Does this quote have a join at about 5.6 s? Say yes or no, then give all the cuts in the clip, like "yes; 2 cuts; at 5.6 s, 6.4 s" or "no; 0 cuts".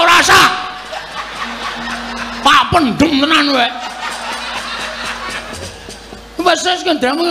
yes; 1 cut; at 5.6 s